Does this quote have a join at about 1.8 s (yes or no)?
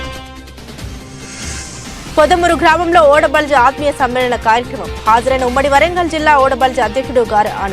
yes